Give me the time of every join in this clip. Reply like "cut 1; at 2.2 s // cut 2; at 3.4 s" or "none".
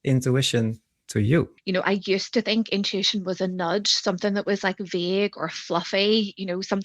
cut 1; at 1.6 s